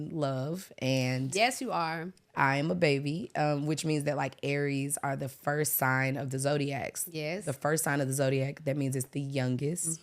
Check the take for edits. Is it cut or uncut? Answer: uncut